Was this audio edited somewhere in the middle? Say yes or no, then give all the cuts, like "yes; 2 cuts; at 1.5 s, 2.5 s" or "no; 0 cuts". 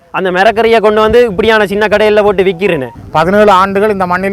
yes; 1 cut; at 2.9 s